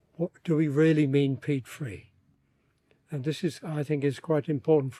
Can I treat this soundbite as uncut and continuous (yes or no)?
yes